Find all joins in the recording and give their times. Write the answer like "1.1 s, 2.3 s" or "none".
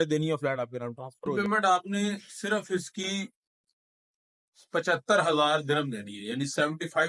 1.3 s